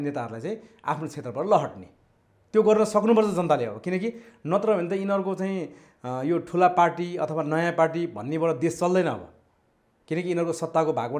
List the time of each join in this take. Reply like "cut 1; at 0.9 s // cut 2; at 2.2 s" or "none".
none

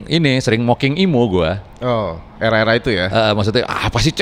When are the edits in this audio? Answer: none

